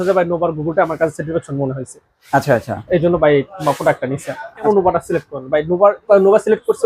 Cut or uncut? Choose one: cut